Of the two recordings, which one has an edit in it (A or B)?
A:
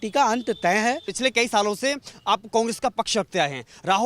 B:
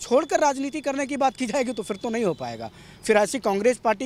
A